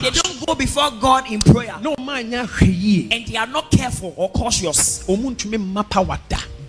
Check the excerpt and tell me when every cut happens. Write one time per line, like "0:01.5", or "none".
none